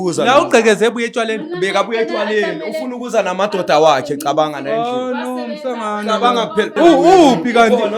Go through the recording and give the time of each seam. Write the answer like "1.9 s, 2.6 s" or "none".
6.7 s